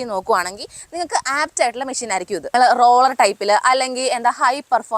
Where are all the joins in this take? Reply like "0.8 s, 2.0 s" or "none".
2.5 s